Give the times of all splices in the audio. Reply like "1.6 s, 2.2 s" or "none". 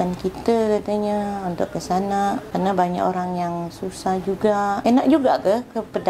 2.5 s, 4.8 s

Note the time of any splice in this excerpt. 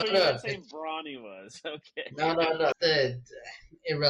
2.8 s

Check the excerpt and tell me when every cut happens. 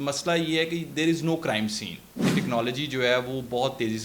2.3 s

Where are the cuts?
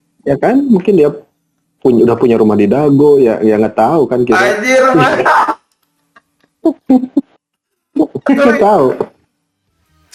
none

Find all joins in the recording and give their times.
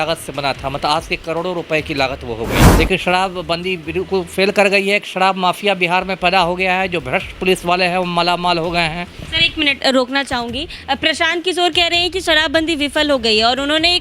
2.6 s

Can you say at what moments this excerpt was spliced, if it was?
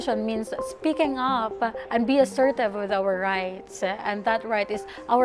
none

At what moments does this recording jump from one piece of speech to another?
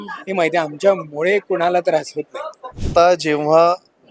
2.8 s

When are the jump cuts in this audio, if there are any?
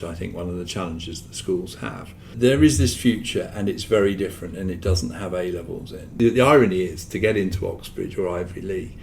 2.3 s, 6.1 s

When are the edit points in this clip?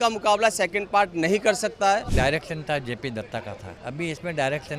2.1 s, 3.7 s

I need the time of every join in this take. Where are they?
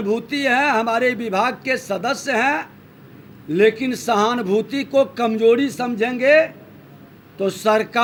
none

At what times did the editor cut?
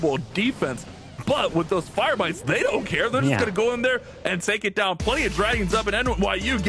none

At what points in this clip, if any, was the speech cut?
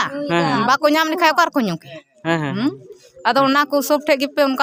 none

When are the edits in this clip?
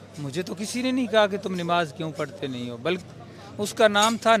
3.0 s

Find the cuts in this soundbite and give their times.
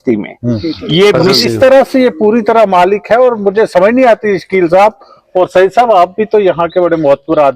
1.3 s

